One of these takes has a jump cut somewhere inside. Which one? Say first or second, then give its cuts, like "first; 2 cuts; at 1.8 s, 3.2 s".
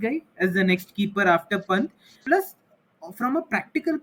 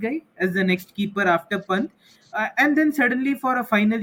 first; 1 cut; at 2.1 s